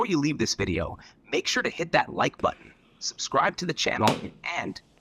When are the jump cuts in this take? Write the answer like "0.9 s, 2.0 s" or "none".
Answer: none